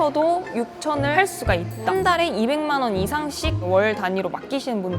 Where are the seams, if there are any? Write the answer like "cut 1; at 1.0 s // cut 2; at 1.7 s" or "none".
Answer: cut 1; at 1.9 s